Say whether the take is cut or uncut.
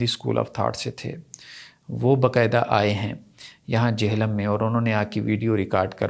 uncut